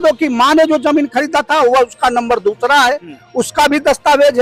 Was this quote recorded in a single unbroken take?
yes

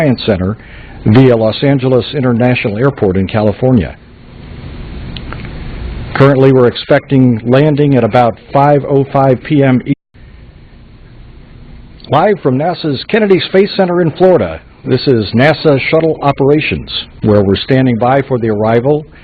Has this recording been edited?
no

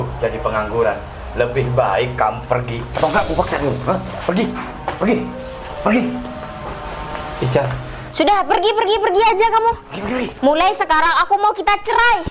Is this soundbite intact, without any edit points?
yes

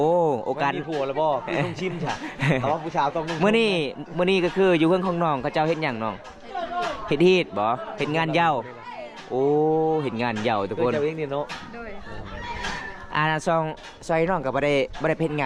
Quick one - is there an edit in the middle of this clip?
no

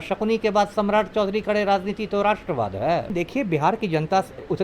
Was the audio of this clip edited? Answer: yes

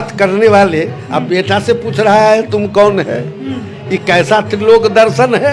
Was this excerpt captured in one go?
yes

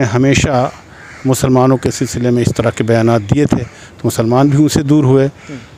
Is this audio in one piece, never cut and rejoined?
yes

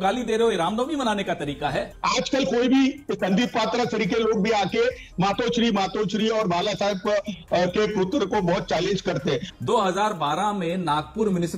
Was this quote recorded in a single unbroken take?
no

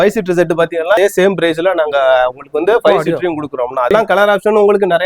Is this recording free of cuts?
no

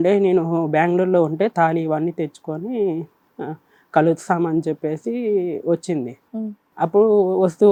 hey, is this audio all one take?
yes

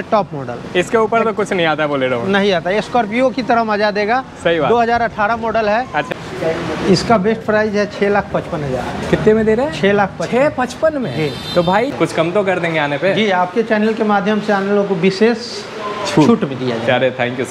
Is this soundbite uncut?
no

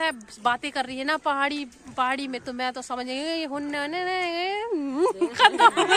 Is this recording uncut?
yes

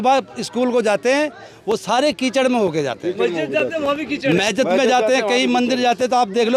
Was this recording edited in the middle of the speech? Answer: no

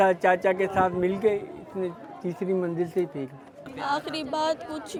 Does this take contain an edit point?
no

